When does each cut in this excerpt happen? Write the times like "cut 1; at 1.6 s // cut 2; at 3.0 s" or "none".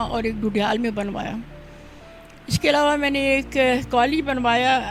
none